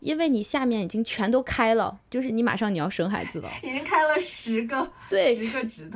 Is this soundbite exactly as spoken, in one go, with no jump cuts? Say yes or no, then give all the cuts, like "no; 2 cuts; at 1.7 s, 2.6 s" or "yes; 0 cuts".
yes; 0 cuts